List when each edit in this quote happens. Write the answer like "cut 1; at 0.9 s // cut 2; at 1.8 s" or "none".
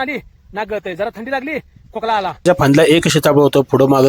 cut 1; at 2.4 s